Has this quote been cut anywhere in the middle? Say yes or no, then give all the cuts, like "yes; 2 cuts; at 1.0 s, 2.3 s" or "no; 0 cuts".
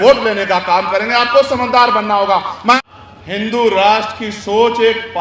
yes; 2 cuts; at 1.2 s, 2.7 s